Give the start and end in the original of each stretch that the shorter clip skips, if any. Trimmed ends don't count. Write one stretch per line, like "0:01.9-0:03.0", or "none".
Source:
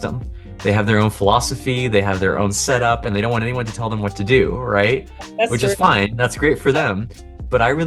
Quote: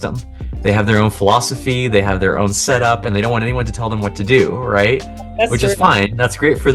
none